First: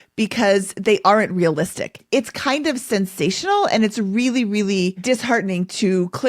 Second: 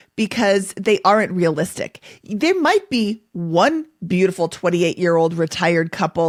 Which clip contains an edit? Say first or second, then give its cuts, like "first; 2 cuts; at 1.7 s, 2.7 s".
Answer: first; 2 cuts; at 2.0 s, 5.0 s